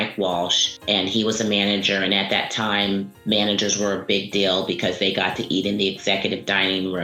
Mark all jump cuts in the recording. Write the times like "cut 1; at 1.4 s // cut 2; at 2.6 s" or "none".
none